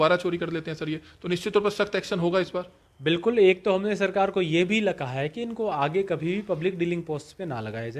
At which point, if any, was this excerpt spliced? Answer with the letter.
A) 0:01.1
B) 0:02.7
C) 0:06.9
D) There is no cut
D